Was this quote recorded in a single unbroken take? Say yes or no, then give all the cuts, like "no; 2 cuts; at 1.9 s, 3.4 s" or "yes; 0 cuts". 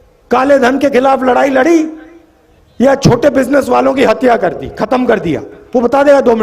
yes; 0 cuts